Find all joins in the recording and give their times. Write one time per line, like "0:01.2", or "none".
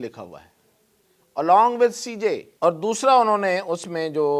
0:02.5